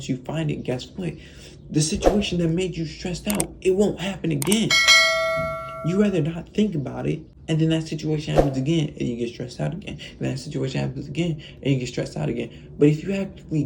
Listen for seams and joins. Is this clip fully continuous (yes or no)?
no